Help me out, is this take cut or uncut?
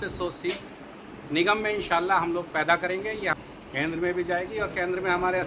cut